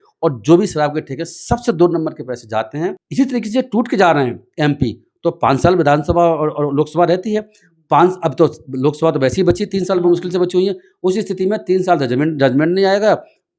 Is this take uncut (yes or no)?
no